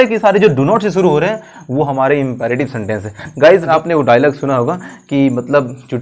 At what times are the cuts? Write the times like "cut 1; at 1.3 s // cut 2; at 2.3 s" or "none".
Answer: cut 1; at 3.6 s